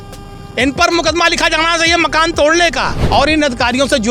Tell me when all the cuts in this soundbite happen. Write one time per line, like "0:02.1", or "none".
0:03.0